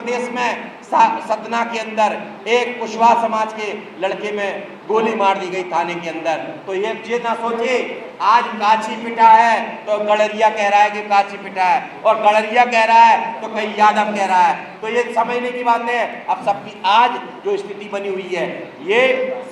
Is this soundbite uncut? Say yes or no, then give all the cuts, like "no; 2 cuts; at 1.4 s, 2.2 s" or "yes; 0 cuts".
yes; 0 cuts